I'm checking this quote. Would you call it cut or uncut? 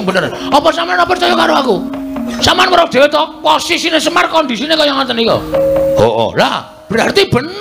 cut